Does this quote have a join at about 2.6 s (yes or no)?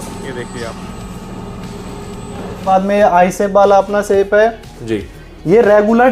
yes